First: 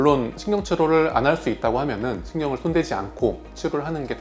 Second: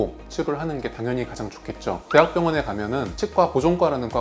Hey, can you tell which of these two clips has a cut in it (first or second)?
second